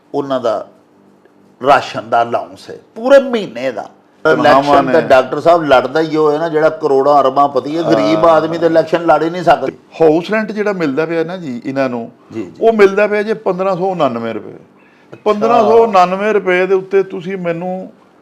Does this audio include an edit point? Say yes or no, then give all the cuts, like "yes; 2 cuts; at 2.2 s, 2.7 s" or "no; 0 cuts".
yes; 2 cuts; at 4.2 s, 9.6 s